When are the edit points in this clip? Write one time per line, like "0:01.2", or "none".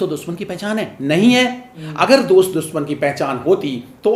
none